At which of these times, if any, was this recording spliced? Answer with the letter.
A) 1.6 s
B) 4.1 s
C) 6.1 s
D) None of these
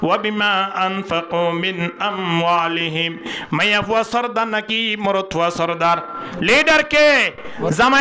D